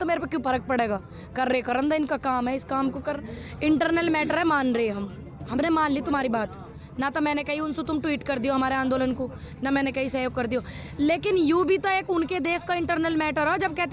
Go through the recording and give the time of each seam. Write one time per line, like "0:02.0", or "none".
0:03.1